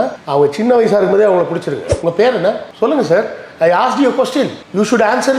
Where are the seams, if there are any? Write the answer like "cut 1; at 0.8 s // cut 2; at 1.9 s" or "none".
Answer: cut 1; at 1.9 s